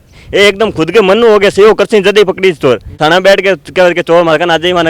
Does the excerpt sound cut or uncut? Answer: cut